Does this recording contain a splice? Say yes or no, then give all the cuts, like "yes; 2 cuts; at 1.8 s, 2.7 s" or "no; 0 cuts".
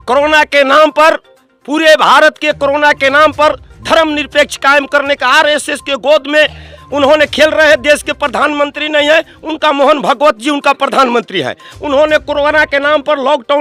no; 0 cuts